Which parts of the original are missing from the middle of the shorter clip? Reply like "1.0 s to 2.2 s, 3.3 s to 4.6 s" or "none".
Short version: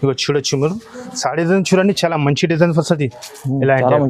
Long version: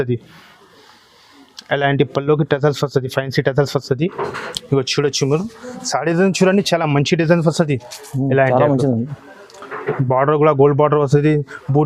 none

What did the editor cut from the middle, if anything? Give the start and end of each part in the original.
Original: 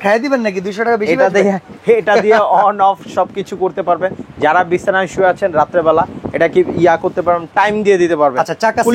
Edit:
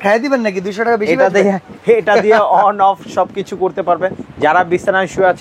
none

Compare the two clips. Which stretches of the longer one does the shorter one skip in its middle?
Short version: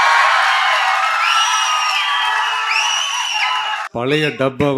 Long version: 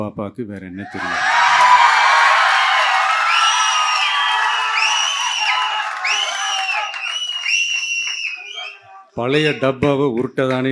5.9 s to 9.1 s

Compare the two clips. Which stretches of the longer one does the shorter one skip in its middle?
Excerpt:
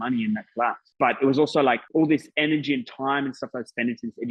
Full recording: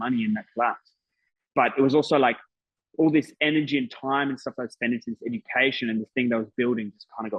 0.8 s to 1.4 s, 2.4 s to 2.9 s

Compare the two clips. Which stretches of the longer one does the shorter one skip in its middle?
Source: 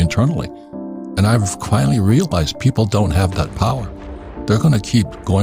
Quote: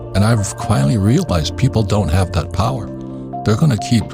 none

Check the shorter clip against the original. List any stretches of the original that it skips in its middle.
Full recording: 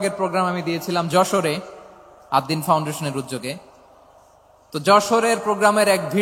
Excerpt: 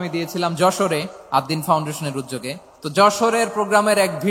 1.7 s to 2.1 s, 3.7 s to 4.6 s

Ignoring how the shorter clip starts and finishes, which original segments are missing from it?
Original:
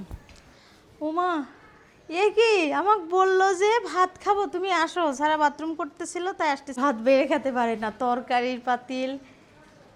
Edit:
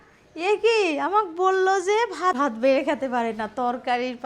4.1 s to 6.8 s

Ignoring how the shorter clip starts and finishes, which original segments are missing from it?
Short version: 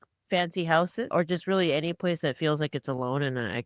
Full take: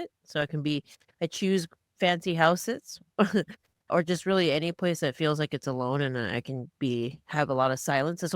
2.8 s to 3.9 s

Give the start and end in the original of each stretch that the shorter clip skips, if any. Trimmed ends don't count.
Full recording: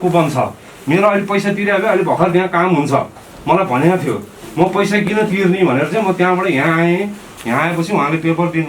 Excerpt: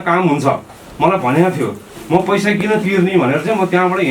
none

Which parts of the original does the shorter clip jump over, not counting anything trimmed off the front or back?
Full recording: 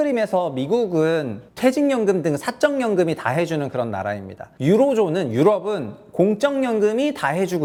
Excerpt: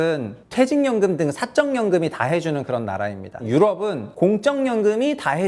4.5 s to 5.3 s, 5.9 s to 6.0 s

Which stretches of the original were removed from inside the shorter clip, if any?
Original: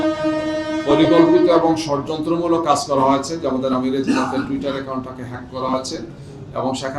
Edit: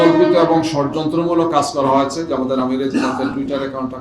none

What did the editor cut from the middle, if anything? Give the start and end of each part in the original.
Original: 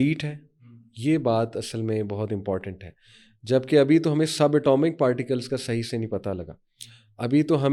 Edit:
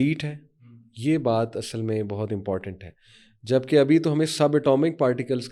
none

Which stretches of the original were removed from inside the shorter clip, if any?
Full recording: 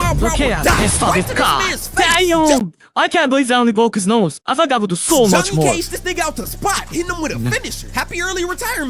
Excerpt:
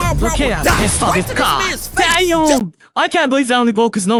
none

